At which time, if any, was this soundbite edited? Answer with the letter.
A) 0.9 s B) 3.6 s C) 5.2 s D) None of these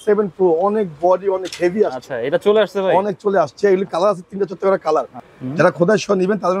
C